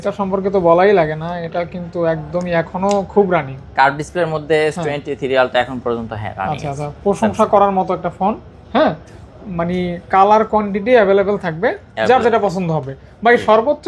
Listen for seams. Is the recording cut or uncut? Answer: uncut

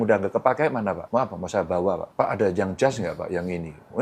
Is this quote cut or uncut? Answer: cut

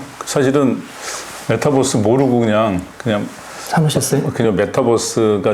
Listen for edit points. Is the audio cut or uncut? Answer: cut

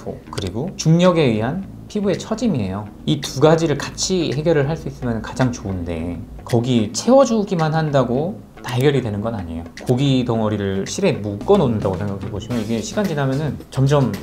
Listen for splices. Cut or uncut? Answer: cut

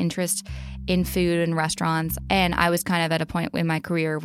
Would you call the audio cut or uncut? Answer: cut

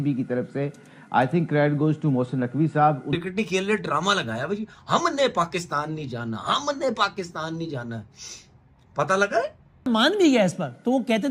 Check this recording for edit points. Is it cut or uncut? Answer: cut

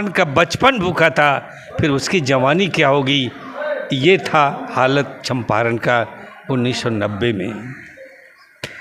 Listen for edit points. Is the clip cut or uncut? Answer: uncut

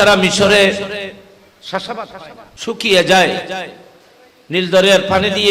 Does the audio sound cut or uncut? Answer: cut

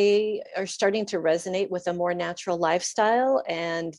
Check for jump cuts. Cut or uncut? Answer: uncut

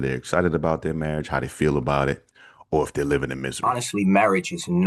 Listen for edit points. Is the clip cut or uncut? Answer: cut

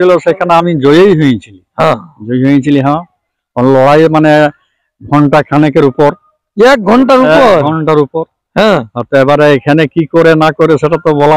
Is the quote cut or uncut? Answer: uncut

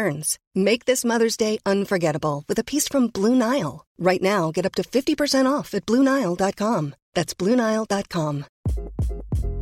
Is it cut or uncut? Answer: uncut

